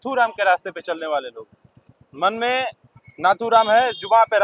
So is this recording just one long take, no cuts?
yes; 0 cuts

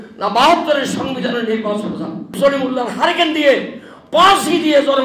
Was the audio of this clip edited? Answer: yes; 1 cut; at 2.3 s

